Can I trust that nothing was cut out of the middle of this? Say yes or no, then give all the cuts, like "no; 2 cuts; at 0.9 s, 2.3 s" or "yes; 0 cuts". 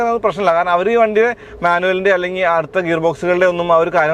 yes; 0 cuts